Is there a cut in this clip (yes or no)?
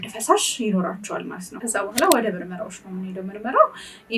yes